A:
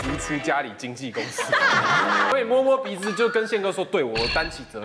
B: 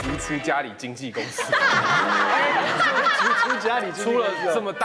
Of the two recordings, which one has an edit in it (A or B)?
A